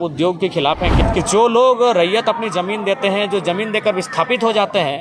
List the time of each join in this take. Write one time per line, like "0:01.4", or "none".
0:00.9